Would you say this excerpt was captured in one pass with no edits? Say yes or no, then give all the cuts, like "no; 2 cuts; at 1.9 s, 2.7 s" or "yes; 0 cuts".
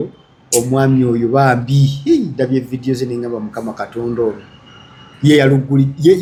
yes; 0 cuts